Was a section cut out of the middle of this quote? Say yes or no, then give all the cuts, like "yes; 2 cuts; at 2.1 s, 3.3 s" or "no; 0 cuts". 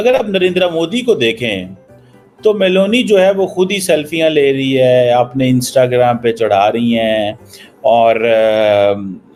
no; 0 cuts